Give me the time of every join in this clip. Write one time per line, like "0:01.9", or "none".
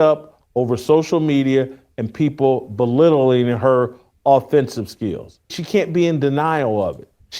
0:05.6